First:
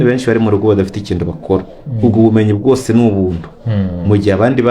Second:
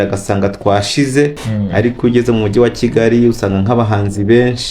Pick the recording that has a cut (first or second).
second